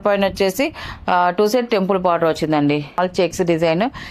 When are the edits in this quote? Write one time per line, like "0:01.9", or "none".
0:03.0